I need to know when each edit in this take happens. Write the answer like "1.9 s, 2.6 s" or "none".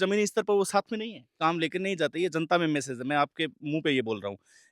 1.4 s